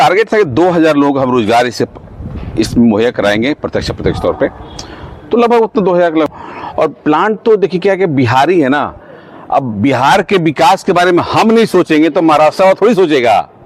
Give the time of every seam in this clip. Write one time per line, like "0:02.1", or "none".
0:06.3